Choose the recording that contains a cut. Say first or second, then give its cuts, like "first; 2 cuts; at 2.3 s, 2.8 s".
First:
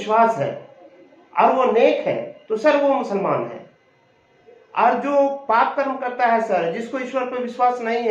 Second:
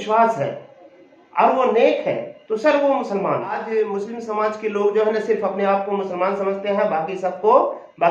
second; 1 cut; at 3.6 s